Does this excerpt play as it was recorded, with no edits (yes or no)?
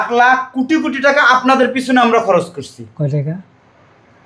yes